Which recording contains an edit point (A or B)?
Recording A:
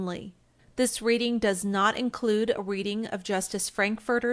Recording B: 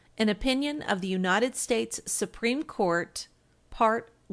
A